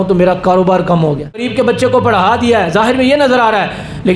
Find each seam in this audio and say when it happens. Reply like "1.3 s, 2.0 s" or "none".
1.3 s

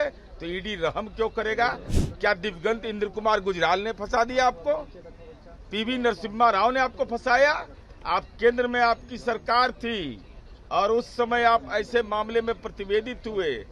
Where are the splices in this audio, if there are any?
1.9 s

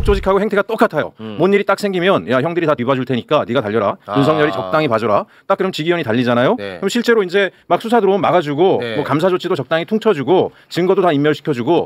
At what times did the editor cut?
none

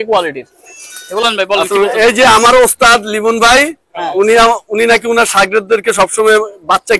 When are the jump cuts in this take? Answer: 1.2 s

